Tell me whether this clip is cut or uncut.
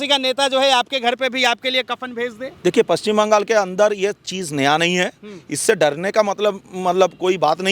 uncut